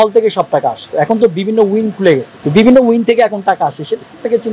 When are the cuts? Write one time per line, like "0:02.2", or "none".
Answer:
0:02.3